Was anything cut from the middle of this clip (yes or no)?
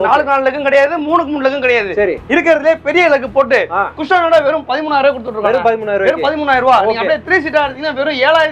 no